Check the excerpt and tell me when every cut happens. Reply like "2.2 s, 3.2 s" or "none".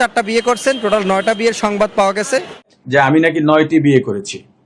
2.8 s